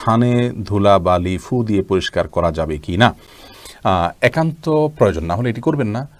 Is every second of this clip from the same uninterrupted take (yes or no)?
yes